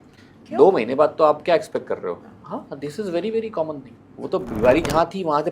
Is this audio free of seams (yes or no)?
no